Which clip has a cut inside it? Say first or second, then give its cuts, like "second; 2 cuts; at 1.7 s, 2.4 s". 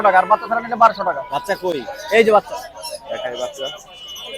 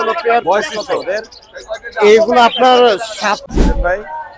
second; 1 cut; at 3.4 s